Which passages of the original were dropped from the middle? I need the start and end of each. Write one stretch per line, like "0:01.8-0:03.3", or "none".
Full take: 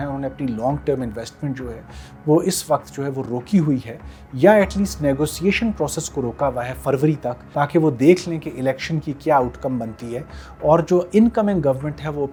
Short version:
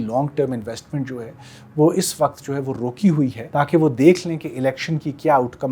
0:03.9-0:07.4